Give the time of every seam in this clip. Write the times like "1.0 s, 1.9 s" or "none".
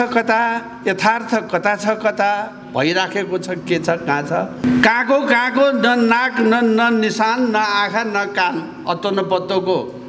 4.6 s